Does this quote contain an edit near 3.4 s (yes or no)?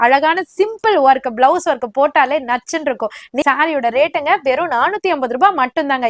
yes